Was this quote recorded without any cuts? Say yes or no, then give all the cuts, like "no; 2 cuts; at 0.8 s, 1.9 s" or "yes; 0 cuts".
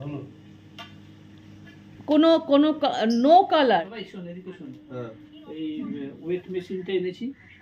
no; 1 cut; at 4.0 s